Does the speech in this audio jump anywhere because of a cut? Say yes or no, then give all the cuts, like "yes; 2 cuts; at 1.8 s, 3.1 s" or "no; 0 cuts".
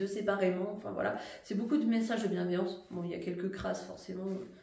no; 0 cuts